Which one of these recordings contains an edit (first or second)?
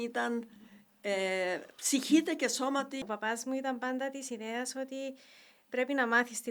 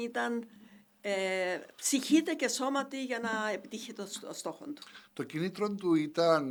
first